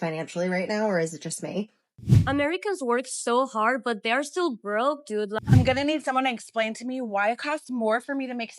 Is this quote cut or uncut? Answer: cut